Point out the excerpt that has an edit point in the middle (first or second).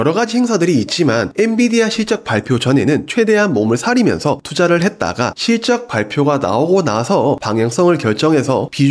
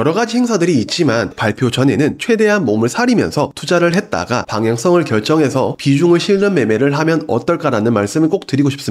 second